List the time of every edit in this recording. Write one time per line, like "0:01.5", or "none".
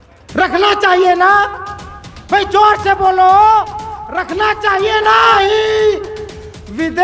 0:05.3